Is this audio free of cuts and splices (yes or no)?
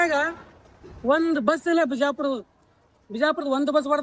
yes